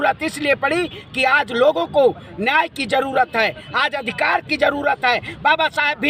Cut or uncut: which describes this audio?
uncut